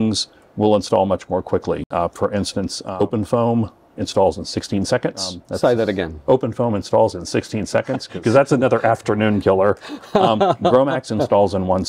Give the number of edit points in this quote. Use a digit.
3